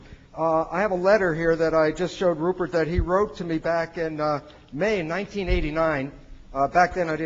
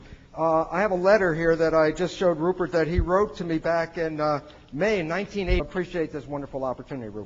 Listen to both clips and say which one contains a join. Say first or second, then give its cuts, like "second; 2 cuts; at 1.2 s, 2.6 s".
first; 1 cut; at 5.6 s